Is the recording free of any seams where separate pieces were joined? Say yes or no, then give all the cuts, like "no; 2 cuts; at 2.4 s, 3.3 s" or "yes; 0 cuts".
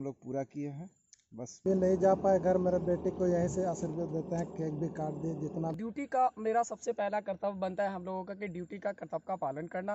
no; 2 cuts; at 1.6 s, 5.8 s